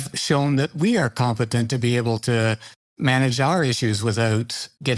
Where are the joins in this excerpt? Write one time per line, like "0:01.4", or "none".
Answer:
none

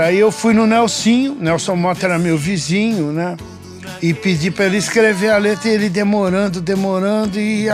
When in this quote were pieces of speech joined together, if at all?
none

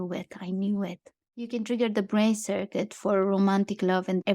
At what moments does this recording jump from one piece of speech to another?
0:01.4

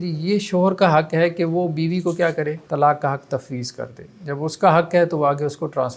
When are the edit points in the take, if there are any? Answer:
0:02.6

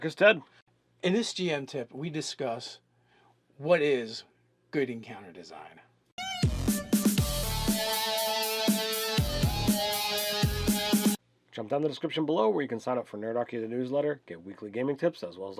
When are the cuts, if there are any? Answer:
0:13.5

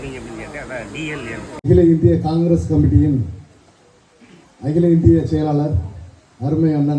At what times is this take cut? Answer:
0:01.6

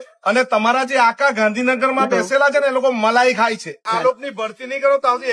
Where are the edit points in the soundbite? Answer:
0:03.8

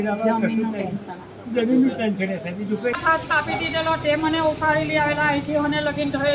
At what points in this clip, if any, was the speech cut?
0:03.0

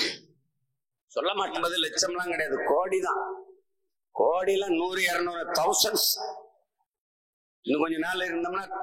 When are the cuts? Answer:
0:01.6

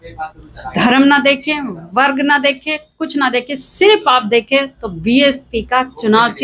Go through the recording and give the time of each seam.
none

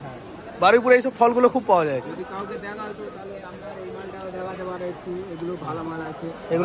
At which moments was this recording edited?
none

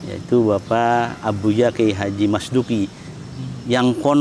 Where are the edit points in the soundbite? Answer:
none

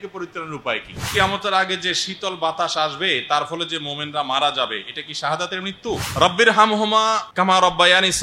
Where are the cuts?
0:01.1
0:06.1
0:07.2

